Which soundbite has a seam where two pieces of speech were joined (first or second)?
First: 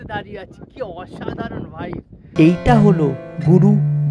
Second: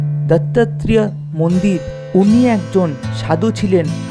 first